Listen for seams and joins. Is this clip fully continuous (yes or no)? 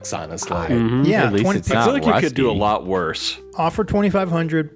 yes